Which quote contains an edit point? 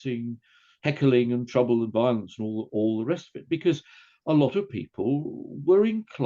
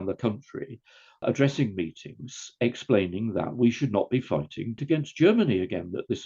second; 2 cuts; at 1.2 s, 4.8 s

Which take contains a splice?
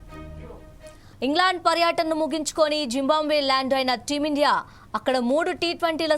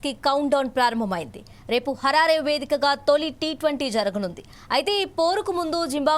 first; 1 cut; at 1.0 s

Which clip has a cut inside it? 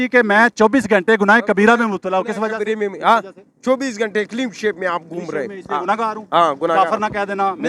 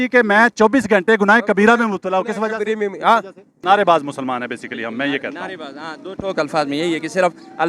second; 1 cut; at 3.6 s

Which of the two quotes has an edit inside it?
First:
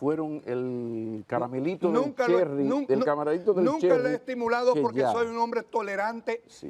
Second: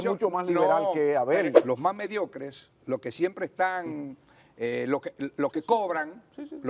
second; 1 cut; at 1.6 s

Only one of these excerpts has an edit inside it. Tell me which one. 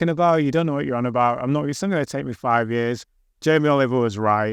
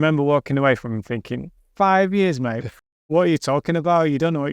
second; 1 cut; at 2.7 s

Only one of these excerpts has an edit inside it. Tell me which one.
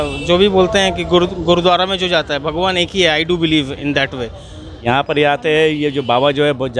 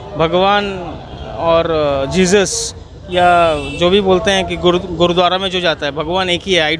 first; 1 cut; at 4.8 s

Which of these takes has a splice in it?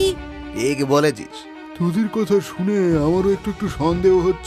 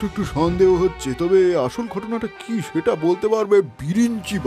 first; 1 cut; at 1.7 s

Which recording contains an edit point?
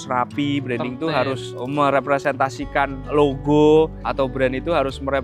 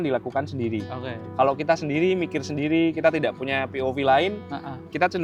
first; 3 cuts; at 1.5 s, 3.0 s, 4.0 s

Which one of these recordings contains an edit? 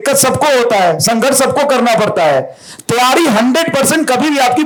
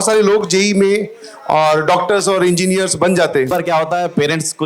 second; 1 cut; at 3.5 s

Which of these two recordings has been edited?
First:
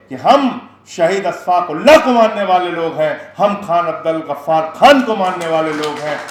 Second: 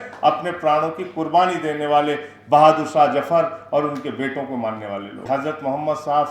second; 1 cut; at 5.1 s

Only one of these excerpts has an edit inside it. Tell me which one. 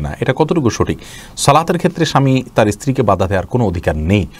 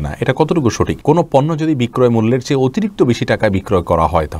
second; 1 cut; at 1.0 s

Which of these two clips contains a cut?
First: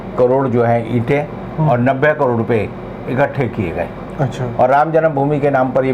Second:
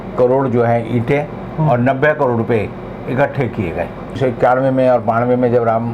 second; 1 cut; at 4.1 s

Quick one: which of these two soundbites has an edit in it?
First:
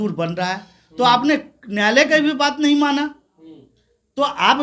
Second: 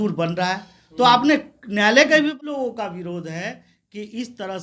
second; 1 cut; at 2.4 s

